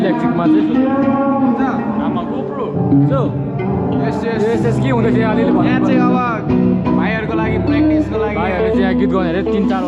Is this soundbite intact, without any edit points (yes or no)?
yes